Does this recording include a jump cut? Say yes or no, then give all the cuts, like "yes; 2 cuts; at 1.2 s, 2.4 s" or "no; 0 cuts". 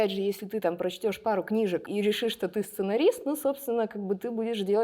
yes; 1 cut; at 1.9 s